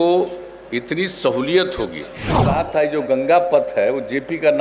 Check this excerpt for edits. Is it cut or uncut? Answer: cut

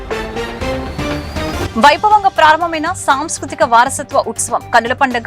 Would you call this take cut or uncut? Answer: uncut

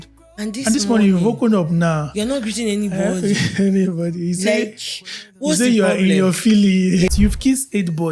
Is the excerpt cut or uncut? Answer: cut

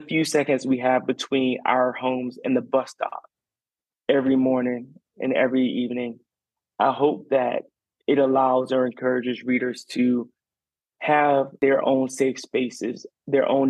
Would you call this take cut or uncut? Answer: cut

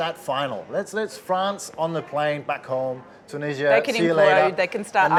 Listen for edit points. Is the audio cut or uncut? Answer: uncut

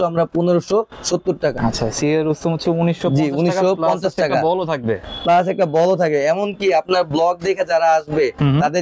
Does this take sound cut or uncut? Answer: cut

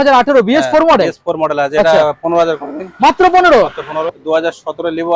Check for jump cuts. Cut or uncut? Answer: cut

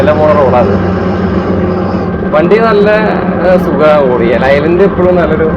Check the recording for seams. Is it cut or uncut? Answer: uncut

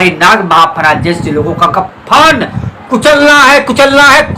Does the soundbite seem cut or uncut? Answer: uncut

